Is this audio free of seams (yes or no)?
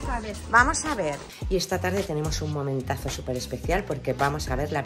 no